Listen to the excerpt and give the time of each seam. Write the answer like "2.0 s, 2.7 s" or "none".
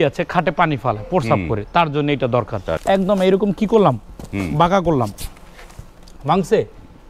2.7 s